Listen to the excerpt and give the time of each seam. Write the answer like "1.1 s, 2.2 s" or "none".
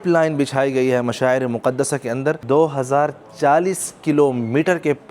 2.4 s